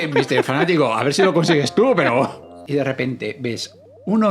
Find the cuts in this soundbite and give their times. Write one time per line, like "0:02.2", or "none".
0:02.6